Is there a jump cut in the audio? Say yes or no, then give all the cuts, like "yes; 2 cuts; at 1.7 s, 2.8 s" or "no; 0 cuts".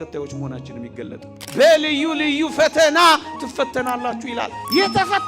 yes; 1 cut; at 1.3 s